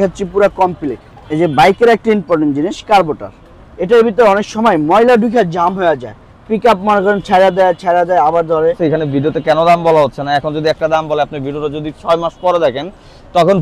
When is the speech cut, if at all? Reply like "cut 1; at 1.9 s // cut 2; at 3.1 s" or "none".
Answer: cut 1; at 1.2 s // cut 2; at 8.8 s